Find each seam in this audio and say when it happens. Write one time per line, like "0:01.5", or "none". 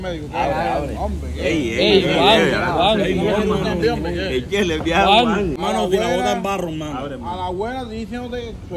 0:05.6

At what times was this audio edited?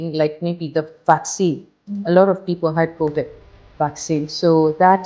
none

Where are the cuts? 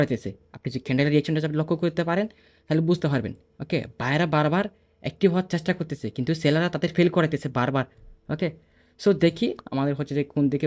none

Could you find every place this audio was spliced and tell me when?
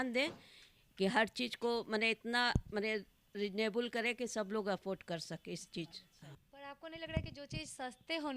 none

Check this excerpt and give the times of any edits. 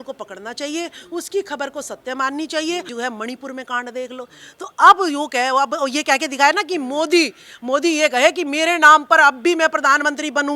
0:02.9

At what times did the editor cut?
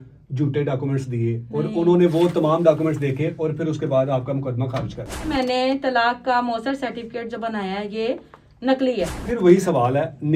0:05.3
0:09.3

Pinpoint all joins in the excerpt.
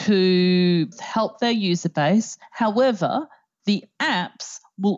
0:00.9
0:02.4

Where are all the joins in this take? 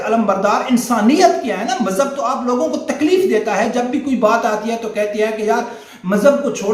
none

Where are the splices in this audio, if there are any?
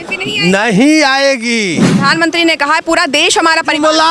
0:01.9

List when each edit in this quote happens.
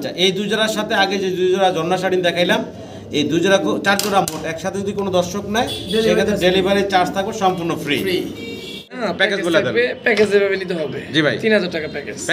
0:09.0

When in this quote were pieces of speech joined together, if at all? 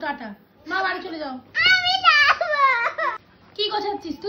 none

